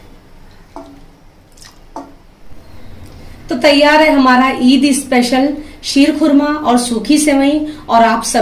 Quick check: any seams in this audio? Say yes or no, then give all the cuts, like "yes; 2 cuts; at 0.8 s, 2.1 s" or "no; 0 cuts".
yes; 1 cut; at 2.4 s